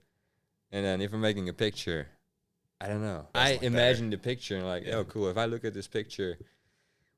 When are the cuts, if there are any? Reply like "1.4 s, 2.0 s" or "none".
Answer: 3.2 s